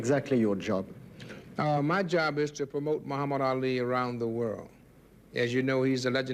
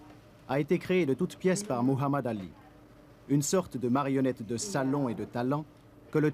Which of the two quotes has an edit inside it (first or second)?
second